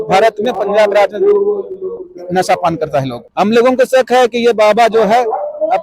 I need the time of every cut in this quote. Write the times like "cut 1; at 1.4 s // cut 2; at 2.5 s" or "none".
cut 1; at 3.2 s